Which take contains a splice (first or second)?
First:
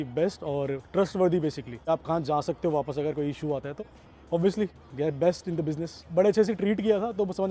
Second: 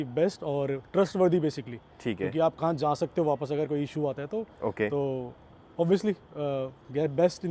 first